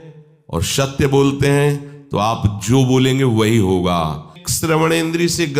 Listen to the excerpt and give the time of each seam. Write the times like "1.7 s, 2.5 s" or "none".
4.4 s